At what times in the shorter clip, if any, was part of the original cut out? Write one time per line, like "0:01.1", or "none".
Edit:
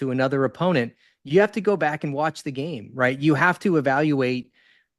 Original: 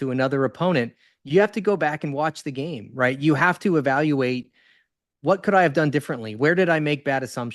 none